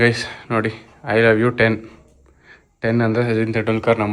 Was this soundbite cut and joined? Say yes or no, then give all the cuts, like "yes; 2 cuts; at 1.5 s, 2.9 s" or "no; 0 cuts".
no; 0 cuts